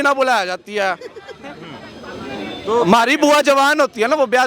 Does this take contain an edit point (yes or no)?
no